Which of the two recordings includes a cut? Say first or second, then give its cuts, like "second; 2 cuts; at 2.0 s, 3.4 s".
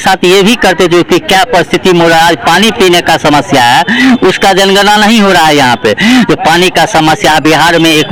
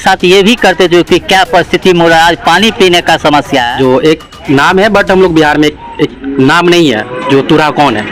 second; 1 cut; at 3.7 s